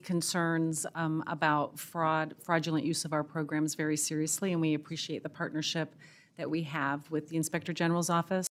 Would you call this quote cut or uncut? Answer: uncut